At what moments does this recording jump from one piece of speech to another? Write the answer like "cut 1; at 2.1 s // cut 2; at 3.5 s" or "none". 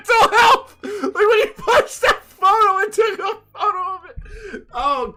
none